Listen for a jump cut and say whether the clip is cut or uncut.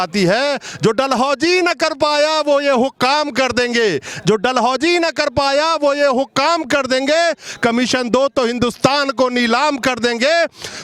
uncut